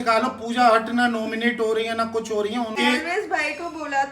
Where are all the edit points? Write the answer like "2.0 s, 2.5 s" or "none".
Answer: 2.7 s